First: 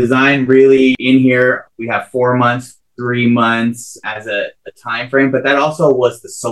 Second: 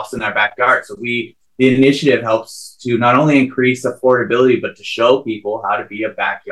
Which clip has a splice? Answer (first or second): first